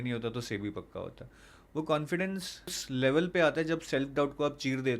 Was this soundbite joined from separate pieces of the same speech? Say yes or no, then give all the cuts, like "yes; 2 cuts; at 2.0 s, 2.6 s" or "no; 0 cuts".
yes; 1 cut; at 2.8 s